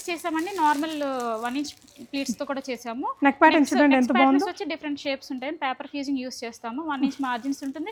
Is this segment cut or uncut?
uncut